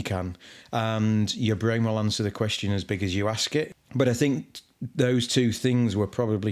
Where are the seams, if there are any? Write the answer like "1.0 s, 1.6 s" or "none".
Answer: 3.8 s